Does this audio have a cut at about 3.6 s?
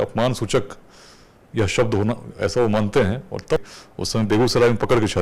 yes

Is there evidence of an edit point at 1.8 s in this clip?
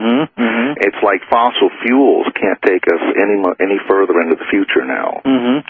yes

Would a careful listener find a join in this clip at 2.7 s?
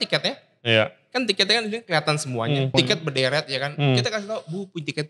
yes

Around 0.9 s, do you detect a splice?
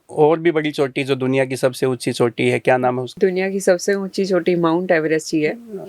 no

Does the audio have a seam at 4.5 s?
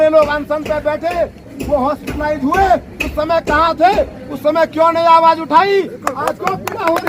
no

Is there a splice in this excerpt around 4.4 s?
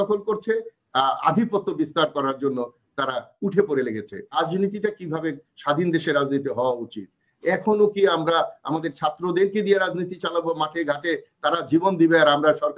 yes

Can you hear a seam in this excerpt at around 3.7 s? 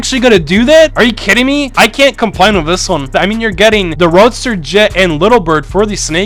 no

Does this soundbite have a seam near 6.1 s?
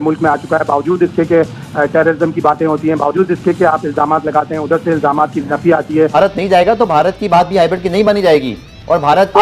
yes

